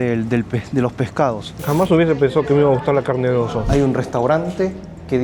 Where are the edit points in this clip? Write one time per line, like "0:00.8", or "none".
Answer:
0:01.5
0:03.7